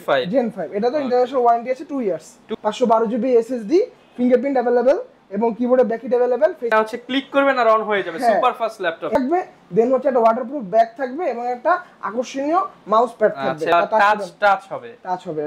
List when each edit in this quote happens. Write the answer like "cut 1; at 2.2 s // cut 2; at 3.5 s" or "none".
cut 1; at 2.5 s // cut 2; at 6.7 s // cut 3; at 9.1 s // cut 4; at 13.7 s